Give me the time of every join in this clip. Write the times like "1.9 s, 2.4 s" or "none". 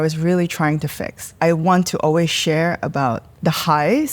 1.4 s, 3.3 s